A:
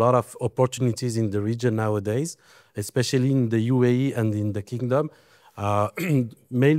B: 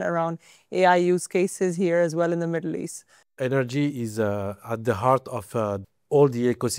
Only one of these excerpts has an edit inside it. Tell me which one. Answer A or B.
B